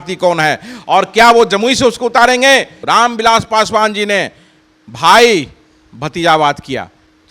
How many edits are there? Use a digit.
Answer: 1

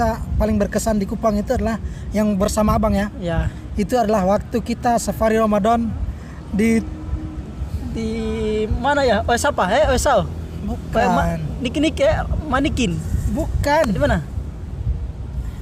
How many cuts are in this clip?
0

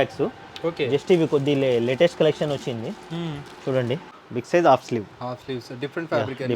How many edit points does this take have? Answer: 1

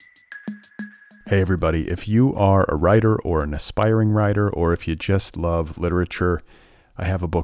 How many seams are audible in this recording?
1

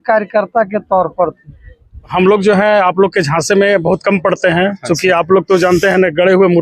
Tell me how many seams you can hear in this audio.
1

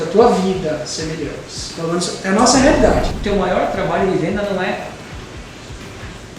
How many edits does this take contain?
1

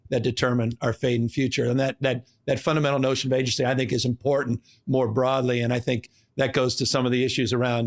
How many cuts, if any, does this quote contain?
1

